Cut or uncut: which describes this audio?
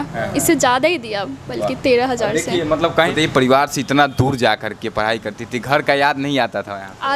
cut